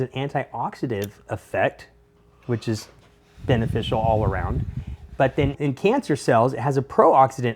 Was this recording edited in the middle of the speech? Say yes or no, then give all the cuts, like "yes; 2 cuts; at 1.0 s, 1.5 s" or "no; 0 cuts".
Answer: yes; 1 cut; at 5.6 s